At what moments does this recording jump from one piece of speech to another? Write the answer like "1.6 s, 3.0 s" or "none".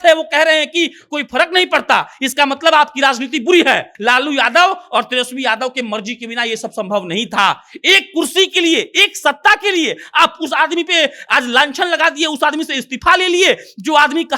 3.9 s

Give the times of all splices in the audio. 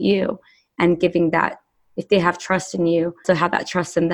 3.2 s

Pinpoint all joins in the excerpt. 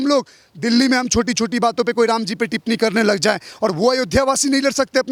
none

